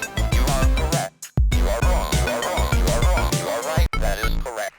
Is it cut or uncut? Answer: cut